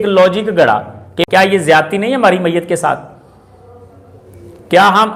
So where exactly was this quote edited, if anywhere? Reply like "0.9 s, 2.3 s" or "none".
1.2 s